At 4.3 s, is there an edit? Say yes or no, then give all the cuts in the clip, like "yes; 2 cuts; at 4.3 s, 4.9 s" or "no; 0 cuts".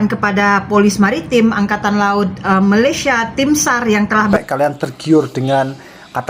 yes; 1 cut; at 4.3 s